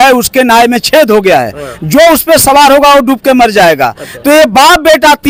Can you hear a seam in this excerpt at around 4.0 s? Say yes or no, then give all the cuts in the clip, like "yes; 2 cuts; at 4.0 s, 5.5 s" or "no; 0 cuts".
no; 0 cuts